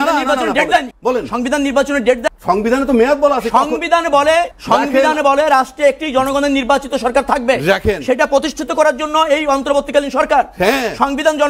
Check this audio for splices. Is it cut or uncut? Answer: cut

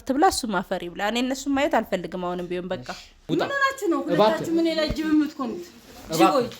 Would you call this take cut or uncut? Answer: cut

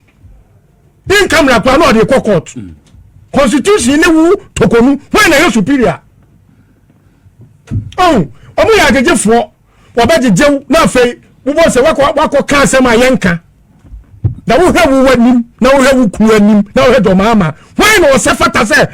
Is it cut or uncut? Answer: cut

